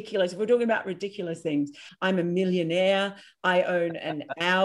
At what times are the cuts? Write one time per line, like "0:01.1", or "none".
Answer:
0:01.8